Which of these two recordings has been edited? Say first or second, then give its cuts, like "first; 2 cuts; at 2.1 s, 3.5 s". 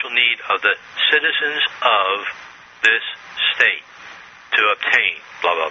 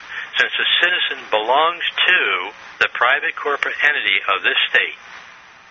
second; 1 cut; at 3.8 s